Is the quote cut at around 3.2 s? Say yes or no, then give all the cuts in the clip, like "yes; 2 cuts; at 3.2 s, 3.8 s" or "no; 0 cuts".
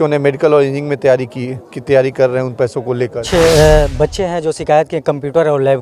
yes; 1 cut; at 3.2 s